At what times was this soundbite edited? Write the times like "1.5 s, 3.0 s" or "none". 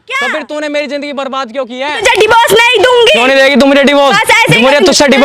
1.8 s

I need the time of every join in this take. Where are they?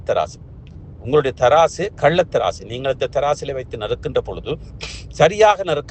none

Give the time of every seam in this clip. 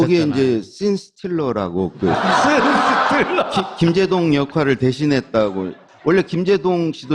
3.0 s

